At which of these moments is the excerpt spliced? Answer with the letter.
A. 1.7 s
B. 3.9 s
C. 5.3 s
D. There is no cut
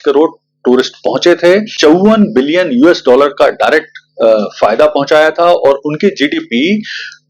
A